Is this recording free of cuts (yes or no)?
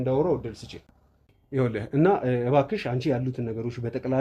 yes